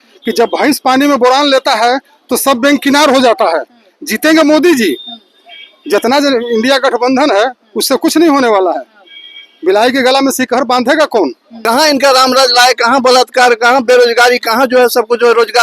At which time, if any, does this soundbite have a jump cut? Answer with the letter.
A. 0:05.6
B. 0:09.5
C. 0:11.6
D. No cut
C